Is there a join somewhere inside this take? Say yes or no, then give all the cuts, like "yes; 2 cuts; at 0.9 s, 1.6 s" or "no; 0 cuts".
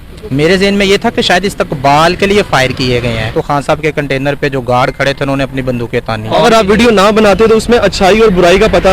yes; 2 cuts; at 3.2 s, 6.3 s